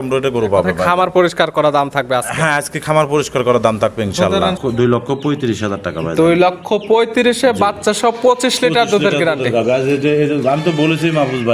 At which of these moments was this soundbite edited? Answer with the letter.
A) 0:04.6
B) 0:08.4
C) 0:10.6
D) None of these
A